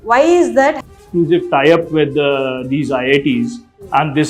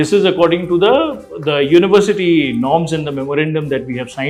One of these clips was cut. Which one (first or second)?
first